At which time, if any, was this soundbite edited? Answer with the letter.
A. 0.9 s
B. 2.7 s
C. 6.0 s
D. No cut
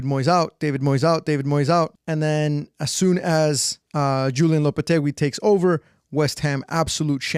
D